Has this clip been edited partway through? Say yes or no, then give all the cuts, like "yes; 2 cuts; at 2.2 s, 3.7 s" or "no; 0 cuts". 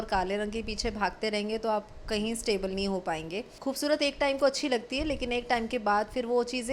yes; 1 cut; at 3.5 s